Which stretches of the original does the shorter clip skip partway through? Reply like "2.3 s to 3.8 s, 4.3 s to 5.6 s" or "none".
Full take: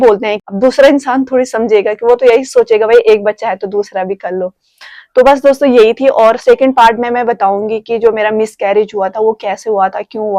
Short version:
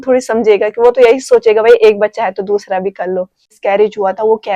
4.8 s to 8.5 s